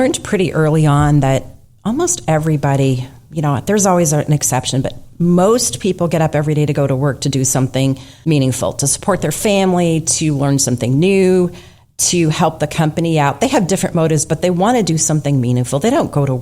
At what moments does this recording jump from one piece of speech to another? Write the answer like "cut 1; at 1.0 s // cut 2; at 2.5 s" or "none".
cut 1; at 8.1 s